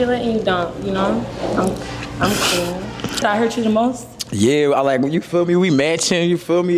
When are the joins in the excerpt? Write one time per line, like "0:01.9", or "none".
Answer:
0:03.2